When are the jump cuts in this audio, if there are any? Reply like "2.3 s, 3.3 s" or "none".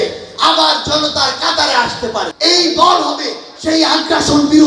2.3 s